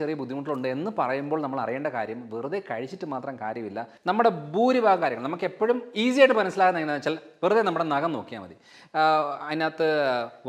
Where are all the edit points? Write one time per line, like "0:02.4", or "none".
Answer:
0:03.9